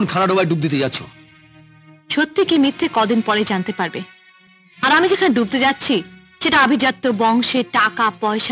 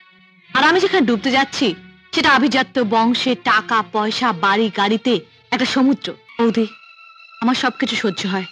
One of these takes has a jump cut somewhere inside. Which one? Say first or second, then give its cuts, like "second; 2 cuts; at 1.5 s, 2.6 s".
second; 1 cut; at 6.2 s